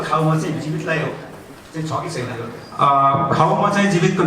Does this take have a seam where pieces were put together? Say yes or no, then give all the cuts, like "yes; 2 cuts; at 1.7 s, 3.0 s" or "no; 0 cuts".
yes; 1 cut; at 2.4 s